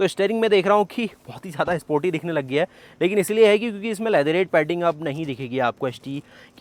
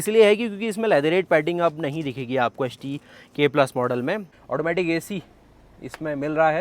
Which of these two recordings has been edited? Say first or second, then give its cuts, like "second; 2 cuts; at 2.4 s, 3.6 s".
second; 1 cut; at 4.3 s